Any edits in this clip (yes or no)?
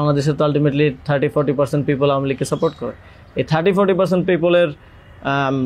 no